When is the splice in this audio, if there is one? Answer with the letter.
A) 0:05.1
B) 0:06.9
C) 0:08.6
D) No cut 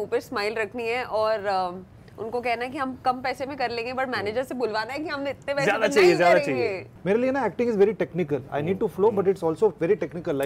B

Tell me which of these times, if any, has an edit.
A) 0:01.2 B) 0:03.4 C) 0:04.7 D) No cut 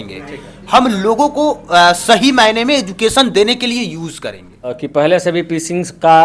C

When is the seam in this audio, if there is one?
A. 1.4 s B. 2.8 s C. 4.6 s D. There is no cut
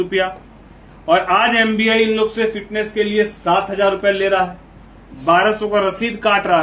D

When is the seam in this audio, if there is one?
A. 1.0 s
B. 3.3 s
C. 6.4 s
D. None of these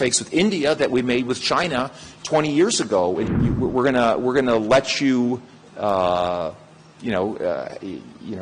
B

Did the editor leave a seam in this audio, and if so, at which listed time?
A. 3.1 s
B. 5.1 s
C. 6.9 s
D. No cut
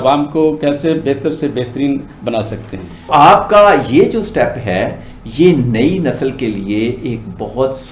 A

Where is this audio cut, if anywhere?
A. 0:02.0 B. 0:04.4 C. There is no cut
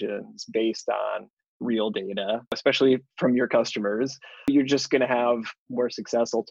C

